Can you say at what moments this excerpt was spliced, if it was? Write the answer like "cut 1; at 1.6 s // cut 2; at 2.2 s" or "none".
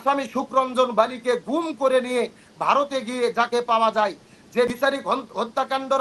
cut 1; at 4.7 s

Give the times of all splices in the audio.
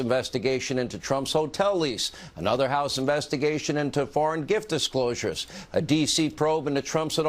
cut 1; at 2.6 s // cut 2; at 5.7 s

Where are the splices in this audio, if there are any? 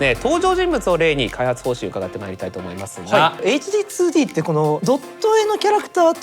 cut 1; at 3.4 s // cut 2; at 4.8 s

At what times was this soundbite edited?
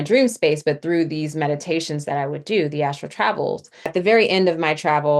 cut 1; at 3.9 s

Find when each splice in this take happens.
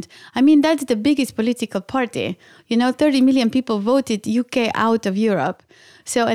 cut 1; at 5.0 s

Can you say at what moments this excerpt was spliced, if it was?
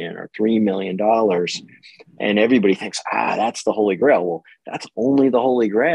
none

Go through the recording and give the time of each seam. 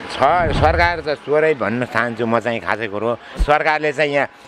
cut 1; at 3.3 s

